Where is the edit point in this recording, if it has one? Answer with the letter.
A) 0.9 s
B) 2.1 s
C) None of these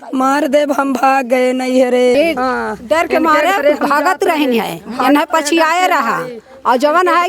B